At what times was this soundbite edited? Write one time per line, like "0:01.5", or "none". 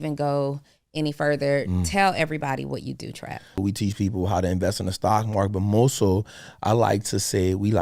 0:03.6